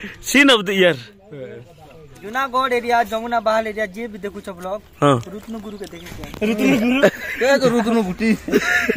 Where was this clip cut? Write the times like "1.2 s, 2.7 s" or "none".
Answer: 2.2 s